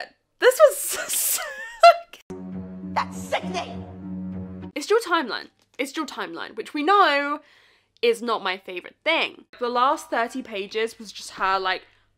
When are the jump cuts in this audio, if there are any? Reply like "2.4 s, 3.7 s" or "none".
4.6 s, 9.6 s